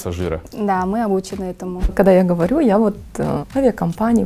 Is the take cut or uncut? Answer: cut